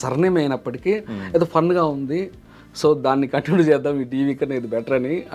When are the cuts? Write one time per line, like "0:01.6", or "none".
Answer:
none